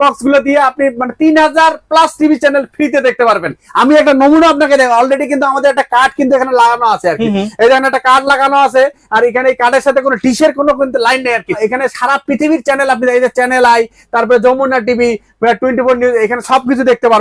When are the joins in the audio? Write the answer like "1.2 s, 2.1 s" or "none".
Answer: 3.6 s, 11.6 s